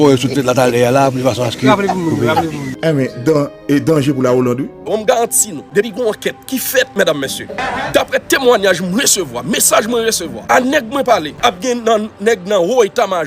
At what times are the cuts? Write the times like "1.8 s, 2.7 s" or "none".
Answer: 4.8 s, 5.6 s, 11.3 s

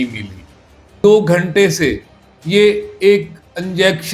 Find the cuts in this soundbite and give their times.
1.0 s

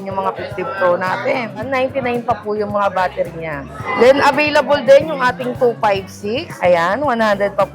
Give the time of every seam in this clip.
1.7 s, 3.8 s, 6.5 s

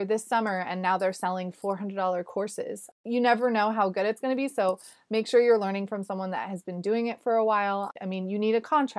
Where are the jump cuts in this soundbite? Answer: 2.8 s, 7.9 s

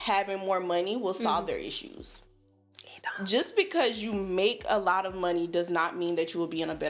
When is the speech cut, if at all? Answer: none

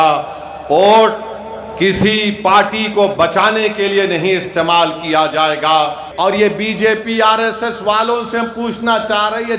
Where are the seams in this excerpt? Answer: 6.0 s

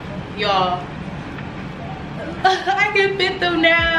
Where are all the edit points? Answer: none

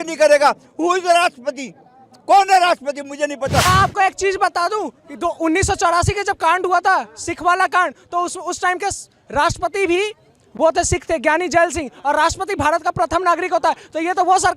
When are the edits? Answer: 3.6 s

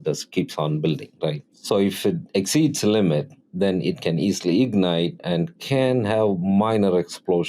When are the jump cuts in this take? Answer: 1.5 s, 3.4 s

